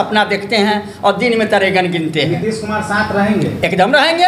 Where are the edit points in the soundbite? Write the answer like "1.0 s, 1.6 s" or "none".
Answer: none